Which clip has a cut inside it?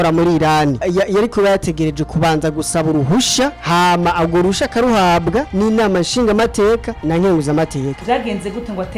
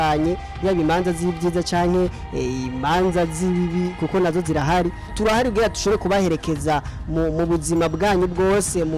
first; 5 cuts; at 0.8 s, 3.6 s, 5.5 s, 6.9 s, 8.0 s

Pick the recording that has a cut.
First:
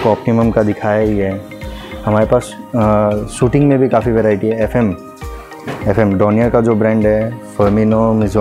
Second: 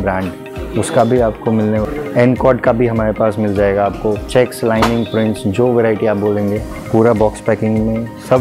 second; 1 cut; at 1.8 s

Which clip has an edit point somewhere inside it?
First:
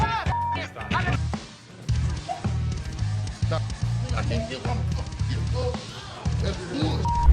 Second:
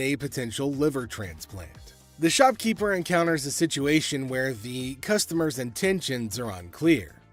first; 1 cut; at 1.2 s

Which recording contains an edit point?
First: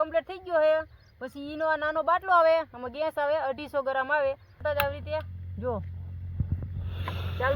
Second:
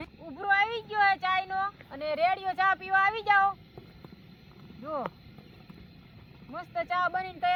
first; 1 cut; at 4.6 s

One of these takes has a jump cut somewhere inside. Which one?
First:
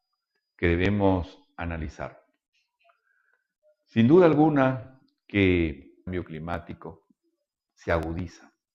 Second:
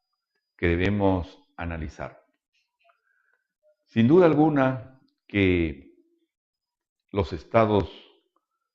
second; 1 cut; at 6.1 s

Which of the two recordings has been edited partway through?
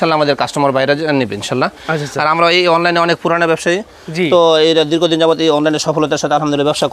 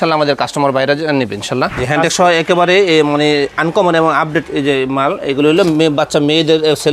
second; 1 cut; at 1.8 s

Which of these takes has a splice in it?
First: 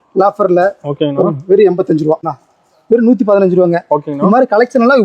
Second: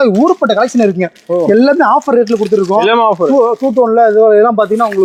first; 1 cut; at 2.3 s

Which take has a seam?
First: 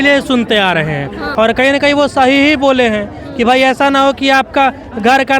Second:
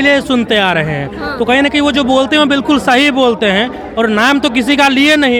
first; 1 cut; at 1.2 s

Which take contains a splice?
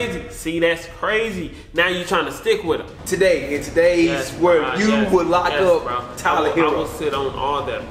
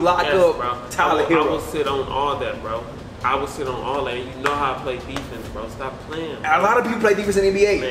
first; 1 cut; at 2.9 s

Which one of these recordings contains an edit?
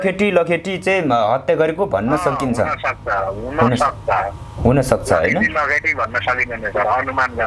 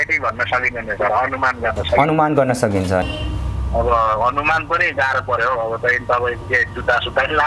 second; 1 cut; at 3.0 s

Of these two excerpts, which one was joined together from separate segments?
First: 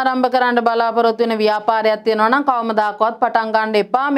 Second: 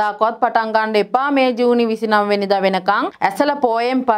second; 1 cut; at 3.1 s

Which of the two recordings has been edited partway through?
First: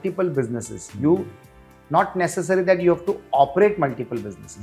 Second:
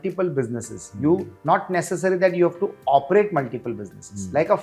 second; 1 cut; at 1.3 s

